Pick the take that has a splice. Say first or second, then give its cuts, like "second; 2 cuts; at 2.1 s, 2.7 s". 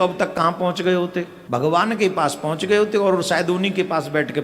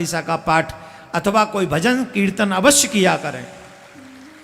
first; 1 cut; at 1.4 s